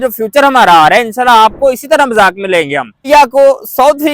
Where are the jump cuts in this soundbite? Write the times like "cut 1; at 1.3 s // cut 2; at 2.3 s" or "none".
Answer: cut 1; at 3.0 s